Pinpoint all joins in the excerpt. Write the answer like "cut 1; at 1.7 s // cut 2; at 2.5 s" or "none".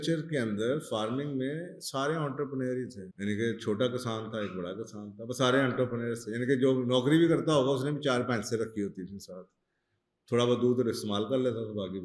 cut 1; at 3.0 s